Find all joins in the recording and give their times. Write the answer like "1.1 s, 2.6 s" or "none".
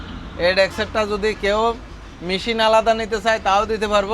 none